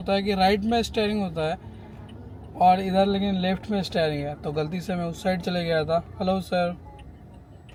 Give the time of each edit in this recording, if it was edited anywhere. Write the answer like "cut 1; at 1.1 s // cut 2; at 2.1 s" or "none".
none

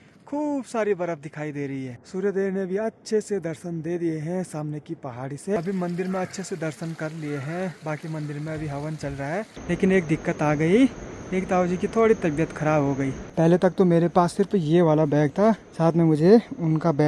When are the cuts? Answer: cut 1; at 2.0 s // cut 2; at 5.6 s // cut 3; at 9.5 s // cut 4; at 13.2 s // cut 5; at 15.7 s

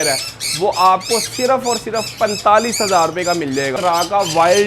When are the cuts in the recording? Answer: cut 1; at 3.7 s

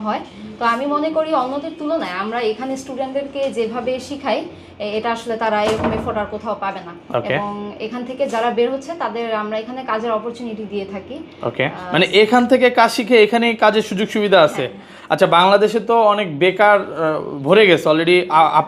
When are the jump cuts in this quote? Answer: none

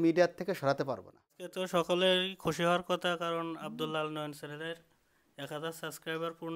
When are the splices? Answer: cut 1; at 1.5 s

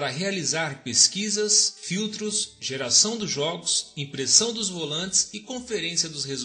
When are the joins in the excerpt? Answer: cut 1; at 5.3 s

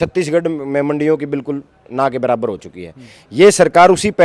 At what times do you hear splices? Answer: none

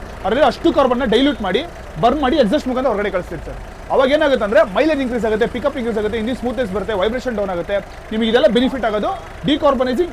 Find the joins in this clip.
none

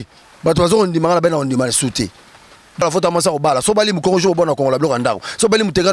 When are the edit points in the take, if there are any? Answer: cut 1; at 2.8 s

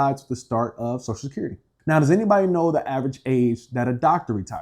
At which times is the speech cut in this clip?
cut 1; at 1.7 s

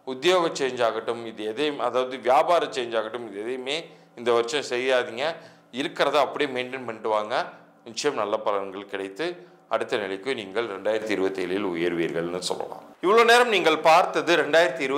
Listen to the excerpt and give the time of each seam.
none

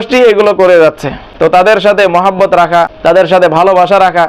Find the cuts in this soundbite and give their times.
cut 1; at 1.7 s // cut 2; at 2.9 s

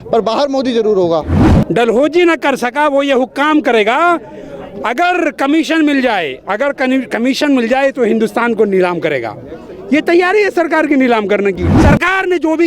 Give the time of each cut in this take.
cut 1; at 1.4 s // cut 2; at 11.7 s

